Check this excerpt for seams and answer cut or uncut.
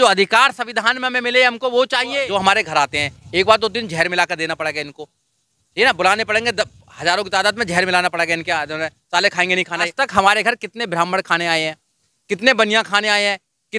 cut